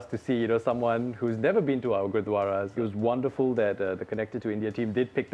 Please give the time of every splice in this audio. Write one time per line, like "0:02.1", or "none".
0:02.7